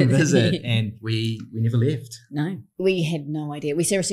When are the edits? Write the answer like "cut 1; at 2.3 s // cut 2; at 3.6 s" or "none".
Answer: cut 1; at 1.0 s // cut 2; at 2.8 s